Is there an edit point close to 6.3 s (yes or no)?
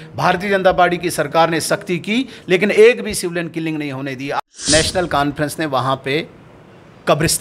no